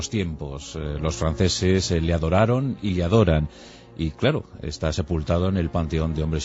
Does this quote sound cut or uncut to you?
cut